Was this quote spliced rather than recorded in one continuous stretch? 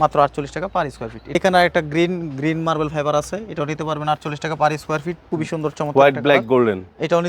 yes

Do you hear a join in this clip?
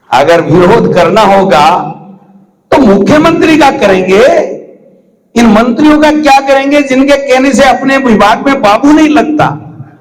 no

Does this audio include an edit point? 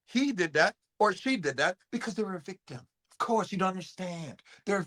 no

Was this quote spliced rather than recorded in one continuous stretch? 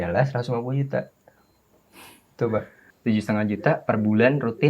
yes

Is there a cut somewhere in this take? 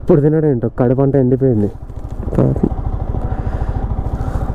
no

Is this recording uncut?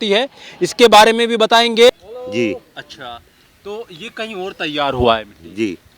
no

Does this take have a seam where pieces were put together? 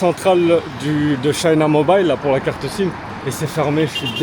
yes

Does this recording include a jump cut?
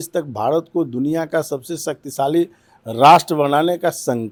no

